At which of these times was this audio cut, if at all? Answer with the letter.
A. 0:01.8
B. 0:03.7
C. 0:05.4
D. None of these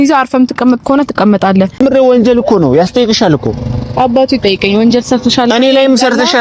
A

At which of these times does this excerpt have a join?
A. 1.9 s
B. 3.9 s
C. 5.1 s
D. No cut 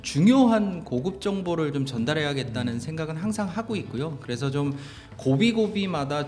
D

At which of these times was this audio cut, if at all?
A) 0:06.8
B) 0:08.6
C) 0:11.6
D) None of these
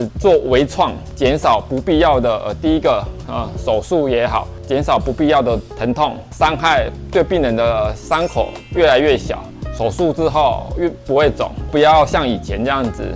C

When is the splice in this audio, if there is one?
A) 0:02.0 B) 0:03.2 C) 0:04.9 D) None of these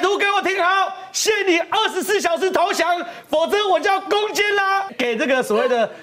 C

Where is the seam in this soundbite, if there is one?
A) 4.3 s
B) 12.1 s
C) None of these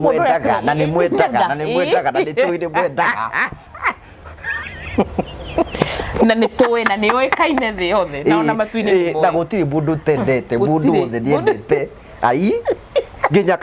A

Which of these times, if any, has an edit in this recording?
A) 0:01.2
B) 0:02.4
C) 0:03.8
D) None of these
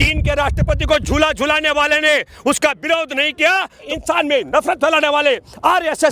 C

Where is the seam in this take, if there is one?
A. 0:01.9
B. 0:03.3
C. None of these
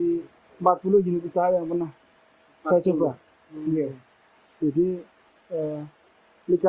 C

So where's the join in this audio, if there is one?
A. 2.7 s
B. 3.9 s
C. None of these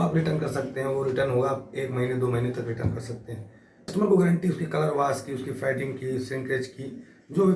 B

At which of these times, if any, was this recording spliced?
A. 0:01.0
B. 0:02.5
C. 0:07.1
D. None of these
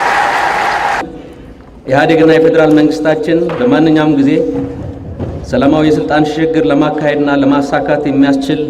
A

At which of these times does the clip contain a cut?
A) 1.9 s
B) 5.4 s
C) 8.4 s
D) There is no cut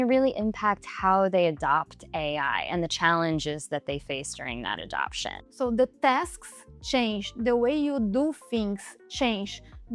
B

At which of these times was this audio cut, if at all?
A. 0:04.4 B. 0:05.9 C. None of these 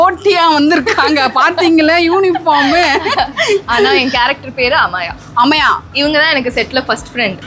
B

